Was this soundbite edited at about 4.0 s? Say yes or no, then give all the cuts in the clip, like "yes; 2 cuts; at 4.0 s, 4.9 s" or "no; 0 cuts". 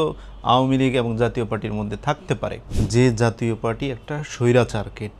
no; 1 cut; at 2.7 s